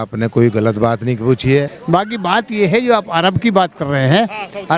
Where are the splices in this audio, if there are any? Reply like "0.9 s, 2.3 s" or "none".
1.7 s